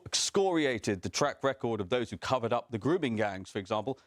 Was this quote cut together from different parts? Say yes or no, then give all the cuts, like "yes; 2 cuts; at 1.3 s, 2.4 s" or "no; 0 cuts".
no; 0 cuts